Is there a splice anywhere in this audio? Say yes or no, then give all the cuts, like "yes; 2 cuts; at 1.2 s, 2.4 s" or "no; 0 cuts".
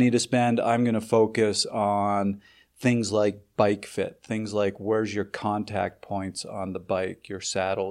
no; 0 cuts